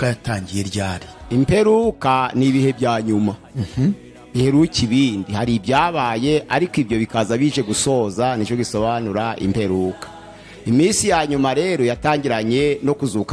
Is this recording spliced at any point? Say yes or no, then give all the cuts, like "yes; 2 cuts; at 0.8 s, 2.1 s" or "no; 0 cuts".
no; 0 cuts